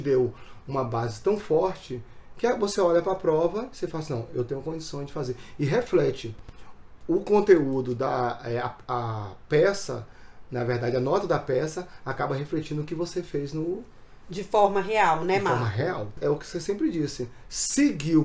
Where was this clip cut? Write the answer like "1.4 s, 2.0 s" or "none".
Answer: 16.1 s